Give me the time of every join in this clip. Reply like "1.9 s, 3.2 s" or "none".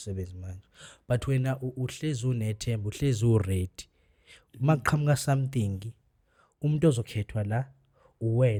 none